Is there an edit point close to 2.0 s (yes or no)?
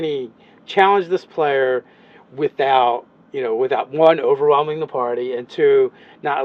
yes